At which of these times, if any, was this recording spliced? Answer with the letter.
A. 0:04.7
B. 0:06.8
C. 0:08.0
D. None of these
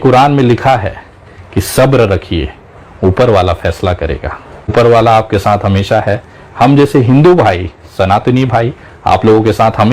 A